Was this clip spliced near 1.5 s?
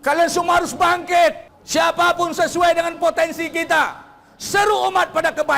yes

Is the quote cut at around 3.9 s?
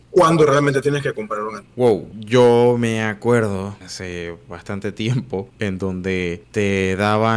yes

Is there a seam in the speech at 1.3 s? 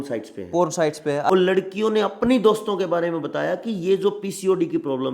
yes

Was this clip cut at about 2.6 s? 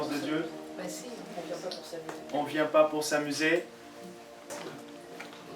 no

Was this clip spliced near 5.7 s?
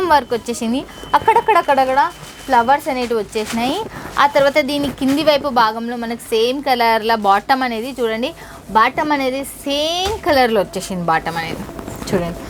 no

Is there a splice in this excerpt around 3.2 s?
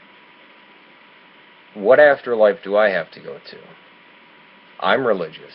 yes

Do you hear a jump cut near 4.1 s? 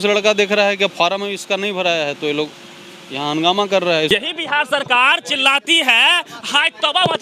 yes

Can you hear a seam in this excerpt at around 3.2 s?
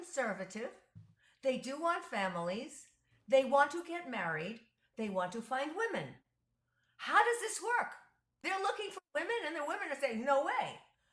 no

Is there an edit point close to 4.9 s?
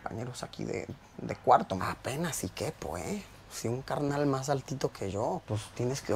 no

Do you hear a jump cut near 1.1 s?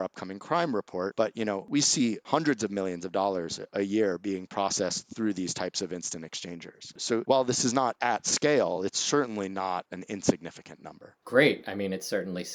no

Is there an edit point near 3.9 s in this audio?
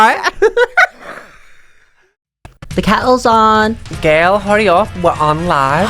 no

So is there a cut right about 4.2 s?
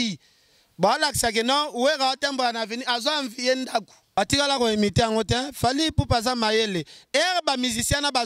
yes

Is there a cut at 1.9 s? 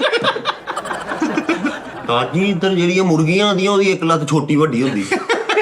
yes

